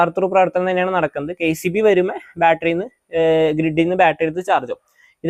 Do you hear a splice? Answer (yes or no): no